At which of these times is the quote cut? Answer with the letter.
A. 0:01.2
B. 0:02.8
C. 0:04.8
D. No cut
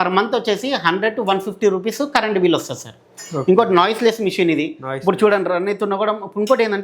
D